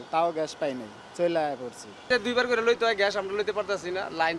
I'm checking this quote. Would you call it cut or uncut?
uncut